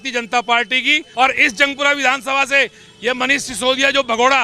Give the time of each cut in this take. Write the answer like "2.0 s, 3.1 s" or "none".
1.0 s